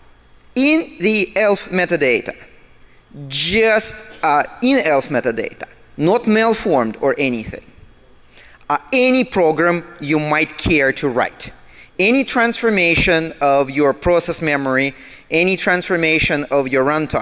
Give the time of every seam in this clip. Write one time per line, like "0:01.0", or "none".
0:03.0